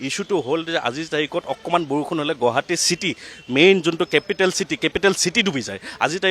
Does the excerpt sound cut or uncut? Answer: uncut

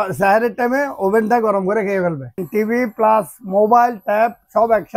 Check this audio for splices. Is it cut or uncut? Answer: cut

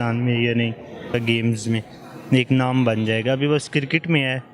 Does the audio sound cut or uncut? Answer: cut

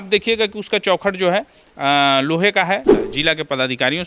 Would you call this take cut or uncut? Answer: cut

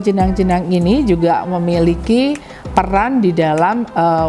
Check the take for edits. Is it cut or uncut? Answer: uncut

